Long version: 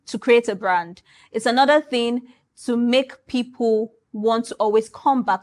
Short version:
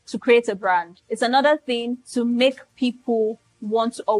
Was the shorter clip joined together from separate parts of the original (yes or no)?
yes